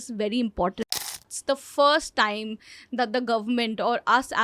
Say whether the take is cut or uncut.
cut